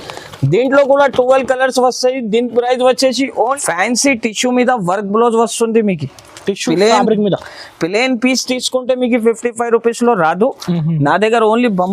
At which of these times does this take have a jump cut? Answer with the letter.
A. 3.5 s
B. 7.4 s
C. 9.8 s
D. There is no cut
A